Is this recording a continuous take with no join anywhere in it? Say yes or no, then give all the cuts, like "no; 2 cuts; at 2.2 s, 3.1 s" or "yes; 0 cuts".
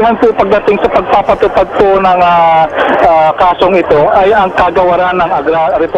yes; 0 cuts